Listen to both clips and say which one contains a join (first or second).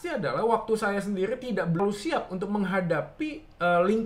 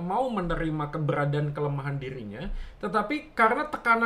first